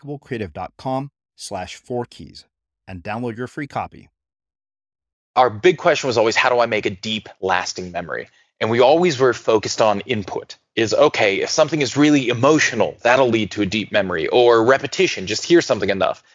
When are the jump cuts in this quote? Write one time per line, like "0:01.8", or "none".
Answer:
0:05.3